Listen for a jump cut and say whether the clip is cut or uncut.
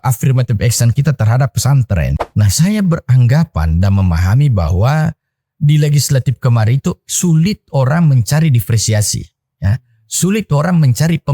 cut